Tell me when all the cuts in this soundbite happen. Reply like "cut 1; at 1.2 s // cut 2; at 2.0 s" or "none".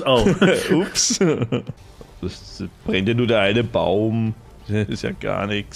cut 1; at 1.8 s